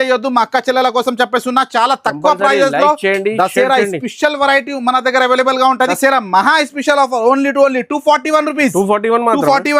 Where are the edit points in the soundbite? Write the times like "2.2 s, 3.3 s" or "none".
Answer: 5.8 s